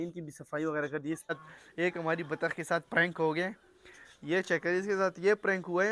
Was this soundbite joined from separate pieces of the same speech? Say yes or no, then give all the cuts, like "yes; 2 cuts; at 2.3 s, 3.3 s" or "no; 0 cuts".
yes; 1 cut; at 1.3 s